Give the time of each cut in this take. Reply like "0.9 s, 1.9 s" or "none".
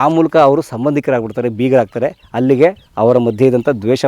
2.8 s

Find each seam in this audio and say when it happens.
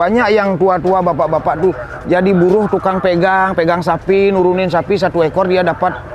none

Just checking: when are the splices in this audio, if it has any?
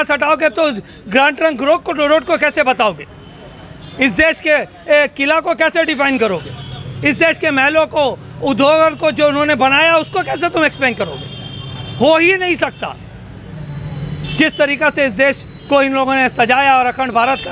none

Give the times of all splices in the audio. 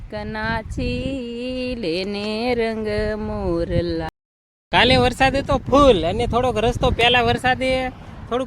4.1 s

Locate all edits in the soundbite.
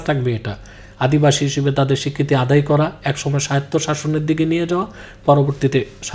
none

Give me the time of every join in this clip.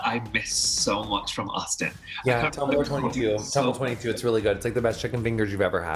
none

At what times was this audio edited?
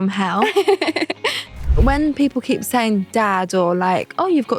1.5 s

